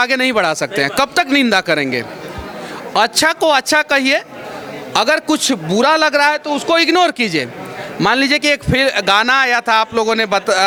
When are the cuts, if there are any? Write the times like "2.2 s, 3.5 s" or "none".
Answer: none